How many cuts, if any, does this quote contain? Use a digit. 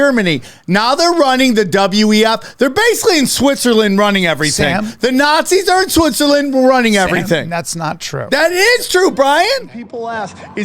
1